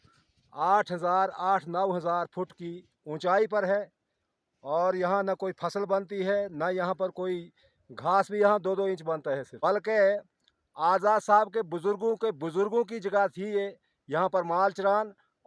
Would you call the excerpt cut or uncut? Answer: cut